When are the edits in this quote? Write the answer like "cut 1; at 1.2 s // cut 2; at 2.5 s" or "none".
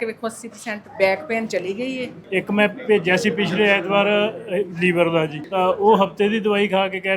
cut 1; at 2.2 s // cut 2; at 5.4 s